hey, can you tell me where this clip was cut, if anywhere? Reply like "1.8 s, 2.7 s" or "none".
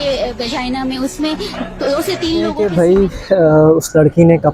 2.6 s